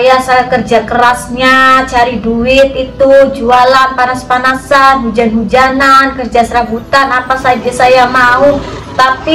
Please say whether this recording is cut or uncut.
uncut